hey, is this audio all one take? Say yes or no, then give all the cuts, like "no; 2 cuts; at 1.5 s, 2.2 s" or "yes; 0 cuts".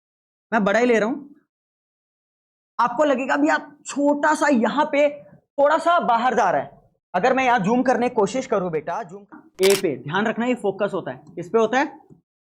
no; 1 cut; at 9.4 s